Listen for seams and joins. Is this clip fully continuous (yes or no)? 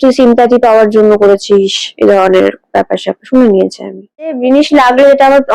no